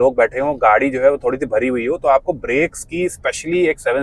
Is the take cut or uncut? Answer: uncut